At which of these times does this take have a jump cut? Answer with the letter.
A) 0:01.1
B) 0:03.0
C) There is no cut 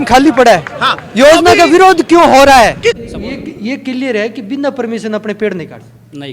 B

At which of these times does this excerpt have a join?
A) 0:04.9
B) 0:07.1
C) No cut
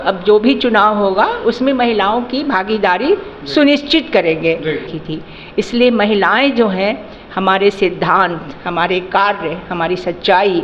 A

